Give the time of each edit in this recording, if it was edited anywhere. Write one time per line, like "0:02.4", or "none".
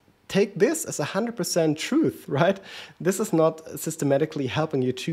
none